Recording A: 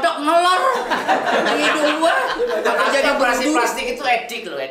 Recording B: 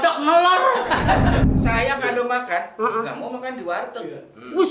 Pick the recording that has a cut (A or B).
B